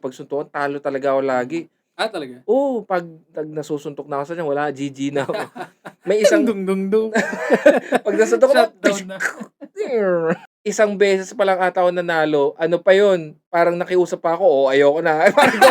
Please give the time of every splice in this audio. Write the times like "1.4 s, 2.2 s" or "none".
10.4 s